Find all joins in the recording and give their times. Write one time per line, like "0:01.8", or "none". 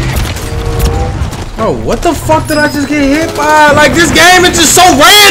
none